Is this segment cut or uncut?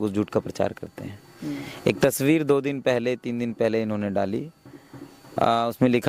uncut